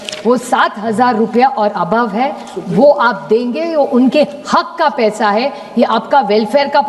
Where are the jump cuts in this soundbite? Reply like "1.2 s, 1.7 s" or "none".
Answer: none